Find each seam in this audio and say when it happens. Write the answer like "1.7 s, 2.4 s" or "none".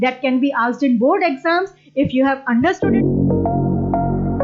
2.8 s